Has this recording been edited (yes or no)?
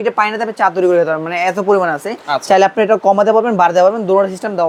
no